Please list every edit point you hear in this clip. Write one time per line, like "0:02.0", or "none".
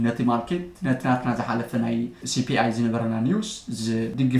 0:02.2